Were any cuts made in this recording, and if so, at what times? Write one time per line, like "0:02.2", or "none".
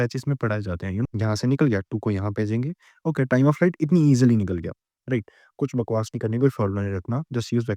0:01.0